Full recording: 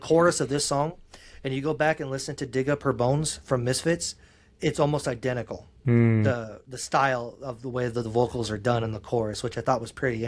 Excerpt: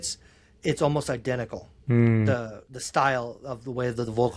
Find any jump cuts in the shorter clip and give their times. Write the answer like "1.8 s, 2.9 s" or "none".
none